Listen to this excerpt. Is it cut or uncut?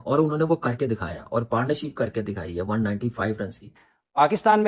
cut